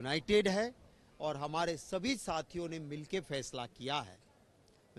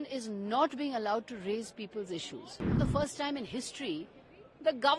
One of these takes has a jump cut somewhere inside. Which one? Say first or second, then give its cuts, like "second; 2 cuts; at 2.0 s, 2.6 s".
second; 1 cut; at 2.8 s